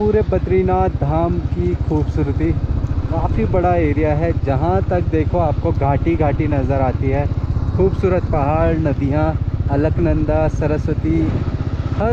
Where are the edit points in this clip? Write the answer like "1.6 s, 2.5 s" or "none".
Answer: none